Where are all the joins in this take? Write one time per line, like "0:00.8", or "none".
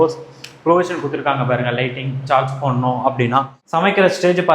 0:03.6